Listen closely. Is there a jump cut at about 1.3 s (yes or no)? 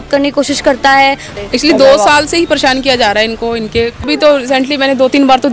yes